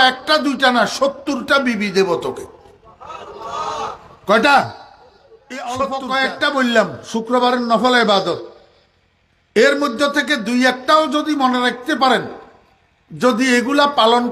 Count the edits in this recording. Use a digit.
1